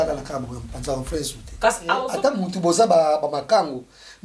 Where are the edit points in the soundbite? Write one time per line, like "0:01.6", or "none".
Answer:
0:02.1